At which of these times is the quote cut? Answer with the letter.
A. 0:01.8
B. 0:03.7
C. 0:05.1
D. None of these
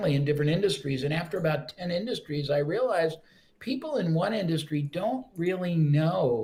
D